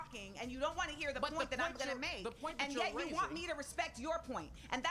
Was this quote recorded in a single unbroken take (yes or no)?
yes